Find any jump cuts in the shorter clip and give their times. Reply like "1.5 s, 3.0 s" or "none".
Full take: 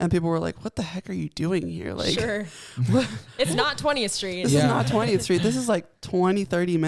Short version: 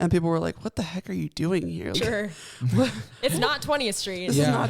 2.0 s